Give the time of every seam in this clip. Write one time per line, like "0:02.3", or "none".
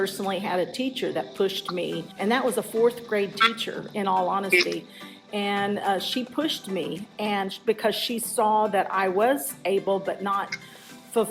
0:02.2